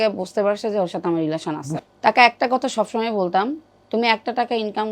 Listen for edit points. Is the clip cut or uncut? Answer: cut